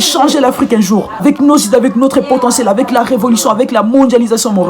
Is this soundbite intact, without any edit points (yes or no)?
no